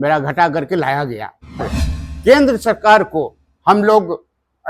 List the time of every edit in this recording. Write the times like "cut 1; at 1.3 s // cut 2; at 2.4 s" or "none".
cut 1; at 1.8 s